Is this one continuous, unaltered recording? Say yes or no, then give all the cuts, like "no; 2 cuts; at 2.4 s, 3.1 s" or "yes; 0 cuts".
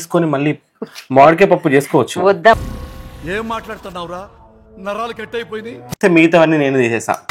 no; 1 cut; at 6.0 s